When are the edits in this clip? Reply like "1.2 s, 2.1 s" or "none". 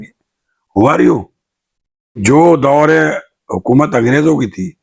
2.2 s